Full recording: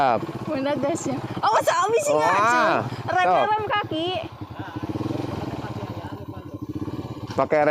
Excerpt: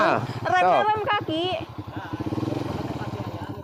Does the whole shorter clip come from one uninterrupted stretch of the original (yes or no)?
yes